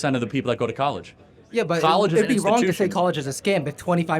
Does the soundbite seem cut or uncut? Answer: uncut